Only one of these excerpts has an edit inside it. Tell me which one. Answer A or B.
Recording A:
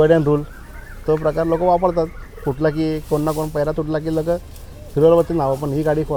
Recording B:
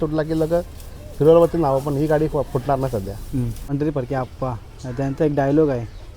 B